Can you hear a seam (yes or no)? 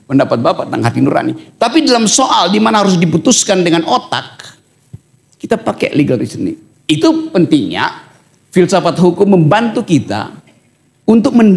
no